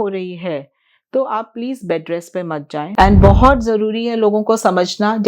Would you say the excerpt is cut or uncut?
cut